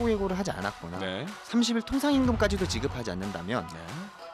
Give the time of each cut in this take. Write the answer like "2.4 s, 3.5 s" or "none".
1.4 s